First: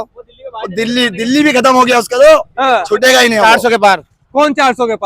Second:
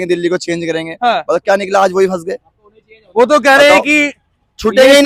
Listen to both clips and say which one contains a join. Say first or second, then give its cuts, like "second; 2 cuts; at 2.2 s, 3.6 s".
first; 1 cut; at 3.4 s